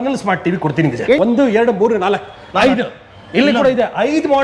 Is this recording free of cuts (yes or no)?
no